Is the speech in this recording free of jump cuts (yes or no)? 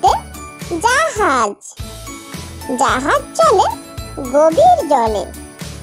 yes